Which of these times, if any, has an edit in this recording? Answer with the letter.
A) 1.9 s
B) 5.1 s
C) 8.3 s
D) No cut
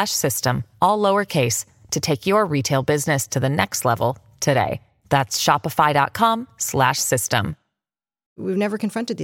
C